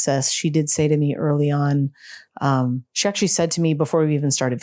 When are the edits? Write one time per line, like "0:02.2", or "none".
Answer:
none